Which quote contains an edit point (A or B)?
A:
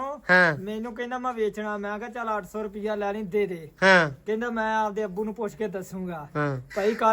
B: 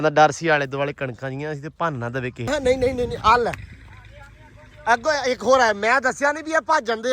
B